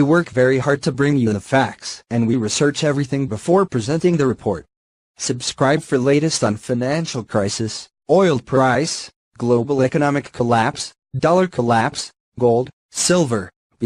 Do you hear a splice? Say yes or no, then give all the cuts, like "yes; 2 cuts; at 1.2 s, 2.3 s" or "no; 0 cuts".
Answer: no; 0 cuts